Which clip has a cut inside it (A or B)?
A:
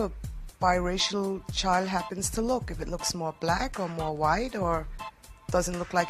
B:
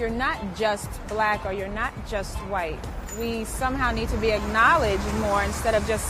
B